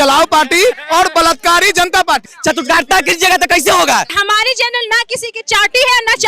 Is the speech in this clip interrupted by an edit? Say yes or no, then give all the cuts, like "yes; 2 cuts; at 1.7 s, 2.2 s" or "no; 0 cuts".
yes; 2 cuts; at 2.3 s, 4.1 s